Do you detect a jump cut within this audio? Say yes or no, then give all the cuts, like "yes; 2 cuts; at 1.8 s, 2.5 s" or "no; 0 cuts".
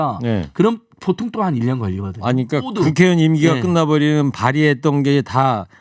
yes; 1 cut; at 2.7 s